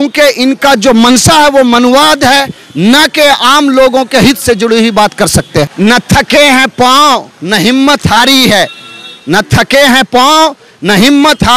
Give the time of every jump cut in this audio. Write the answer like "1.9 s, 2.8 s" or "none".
5.7 s